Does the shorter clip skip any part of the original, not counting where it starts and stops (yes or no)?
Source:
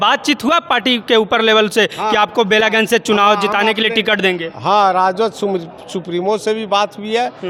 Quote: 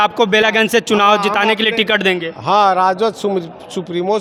no